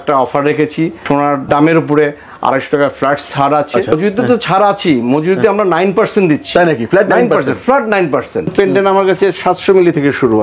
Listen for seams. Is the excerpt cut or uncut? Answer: cut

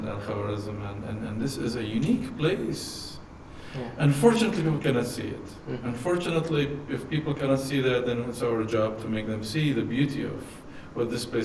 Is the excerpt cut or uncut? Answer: uncut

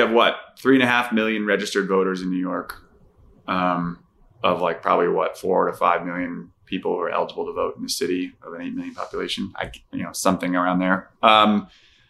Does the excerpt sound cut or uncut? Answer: uncut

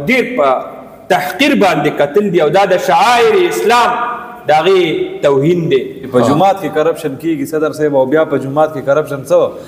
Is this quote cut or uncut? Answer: cut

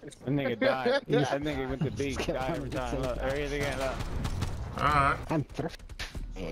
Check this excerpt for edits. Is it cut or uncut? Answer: cut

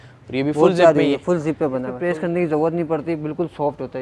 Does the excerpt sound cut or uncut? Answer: cut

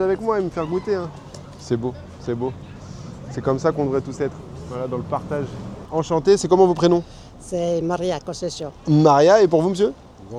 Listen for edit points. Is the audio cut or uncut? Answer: uncut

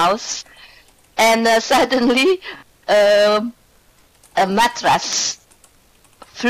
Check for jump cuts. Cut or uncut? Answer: cut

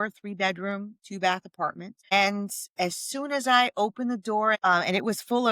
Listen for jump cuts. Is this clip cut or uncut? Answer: cut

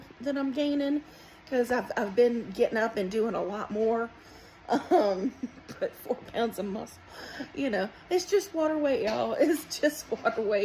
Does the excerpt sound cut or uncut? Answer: uncut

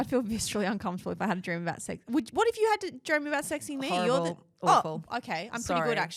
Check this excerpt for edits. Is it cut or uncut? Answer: uncut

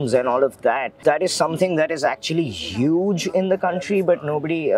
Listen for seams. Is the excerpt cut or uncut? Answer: cut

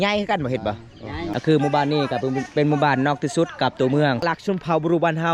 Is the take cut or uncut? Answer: cut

